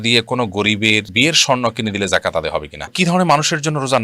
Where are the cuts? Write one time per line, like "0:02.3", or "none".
0:02.9